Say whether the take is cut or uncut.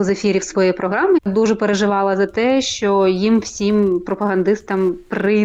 cut